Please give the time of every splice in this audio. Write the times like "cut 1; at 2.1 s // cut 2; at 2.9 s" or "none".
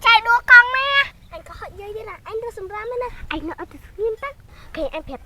cut 1; at 1.2 s